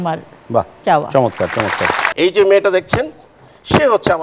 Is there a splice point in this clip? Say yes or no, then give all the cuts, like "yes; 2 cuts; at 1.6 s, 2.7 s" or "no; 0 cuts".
yes; 1 cut; at 2.1 s